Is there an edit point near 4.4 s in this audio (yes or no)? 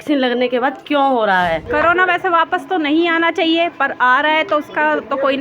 no